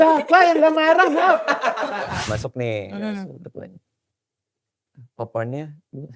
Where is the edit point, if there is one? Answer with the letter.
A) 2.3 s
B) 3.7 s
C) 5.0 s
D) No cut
A